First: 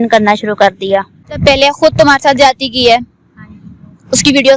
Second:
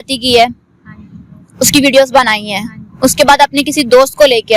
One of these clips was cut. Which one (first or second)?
first